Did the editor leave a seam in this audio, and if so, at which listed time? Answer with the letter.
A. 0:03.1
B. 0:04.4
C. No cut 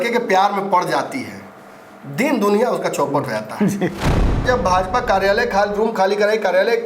B